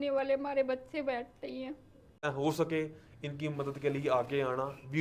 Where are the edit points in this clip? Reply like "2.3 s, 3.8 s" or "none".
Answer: 2.2 s